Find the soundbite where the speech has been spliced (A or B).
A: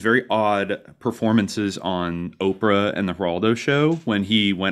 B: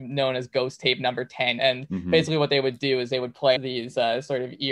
B